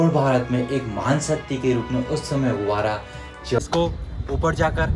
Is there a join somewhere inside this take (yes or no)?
yes